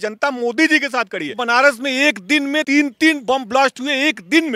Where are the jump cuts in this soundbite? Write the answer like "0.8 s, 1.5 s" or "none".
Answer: 1.4 s, 2.6 s